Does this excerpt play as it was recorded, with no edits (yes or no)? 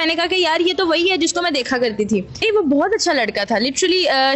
no